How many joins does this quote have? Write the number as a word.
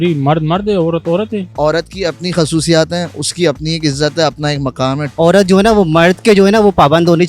two